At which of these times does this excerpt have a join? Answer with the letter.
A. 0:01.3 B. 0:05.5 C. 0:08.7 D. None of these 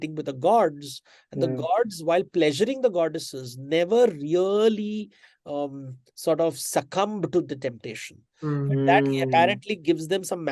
D